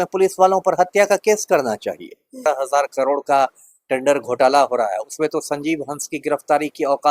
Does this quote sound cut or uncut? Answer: cut